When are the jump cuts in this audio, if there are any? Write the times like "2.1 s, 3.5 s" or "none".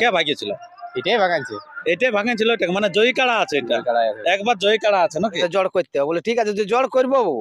5.4 s